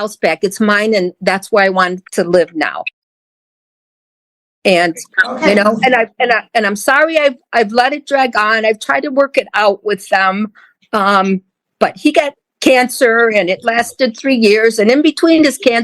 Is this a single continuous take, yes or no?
yes